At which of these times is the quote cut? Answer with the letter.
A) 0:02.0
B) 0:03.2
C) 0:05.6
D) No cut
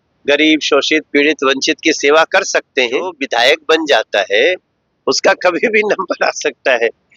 B